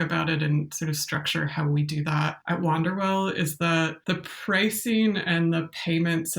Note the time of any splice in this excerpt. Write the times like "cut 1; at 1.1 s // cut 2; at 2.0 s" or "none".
cut 1; at 2.4 s // cut 2; at 4.0 s